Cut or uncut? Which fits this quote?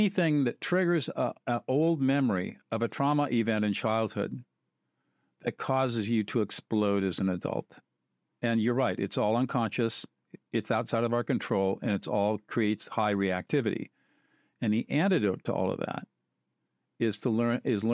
uncut